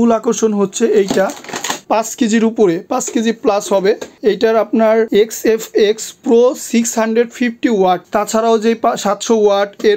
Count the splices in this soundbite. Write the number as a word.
two